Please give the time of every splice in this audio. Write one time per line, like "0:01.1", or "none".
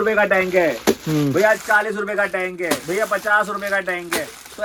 none